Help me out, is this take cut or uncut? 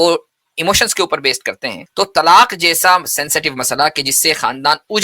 cut